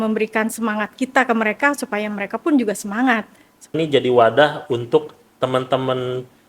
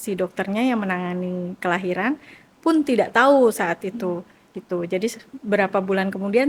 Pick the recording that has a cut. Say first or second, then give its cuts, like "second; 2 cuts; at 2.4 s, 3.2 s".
first; 1 cut; at 3.8 s